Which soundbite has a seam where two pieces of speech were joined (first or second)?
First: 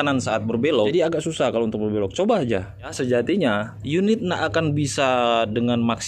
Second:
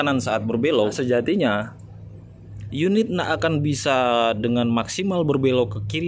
first